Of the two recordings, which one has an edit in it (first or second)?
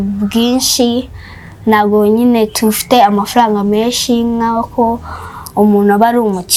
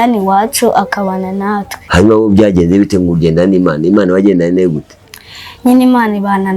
second